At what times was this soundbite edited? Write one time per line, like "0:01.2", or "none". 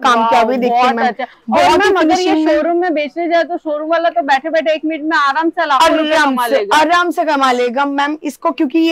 none